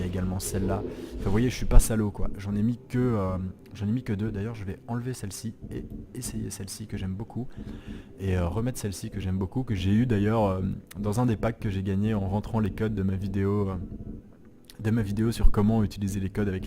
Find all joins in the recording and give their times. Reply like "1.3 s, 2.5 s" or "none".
9.7 s